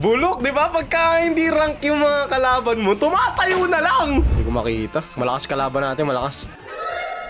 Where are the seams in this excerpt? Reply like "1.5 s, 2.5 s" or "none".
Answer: 4.3 s